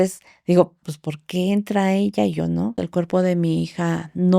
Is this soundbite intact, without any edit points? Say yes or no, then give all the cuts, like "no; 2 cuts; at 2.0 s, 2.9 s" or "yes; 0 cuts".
no; 1 cut; at 2.8 s